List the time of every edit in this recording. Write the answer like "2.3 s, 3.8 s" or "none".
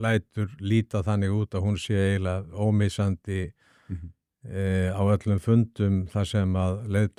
none